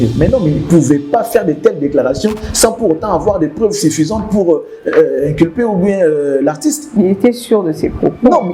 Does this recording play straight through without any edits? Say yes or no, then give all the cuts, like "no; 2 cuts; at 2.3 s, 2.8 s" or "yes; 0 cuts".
yes; 0 cuts